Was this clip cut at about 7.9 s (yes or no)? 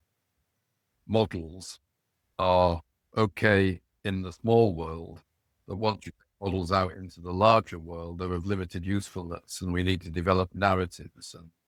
no